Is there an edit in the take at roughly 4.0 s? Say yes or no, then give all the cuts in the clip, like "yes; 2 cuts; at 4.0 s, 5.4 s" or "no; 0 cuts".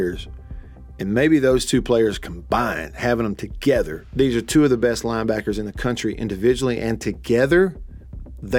yes; 1 cut; at 4.0 s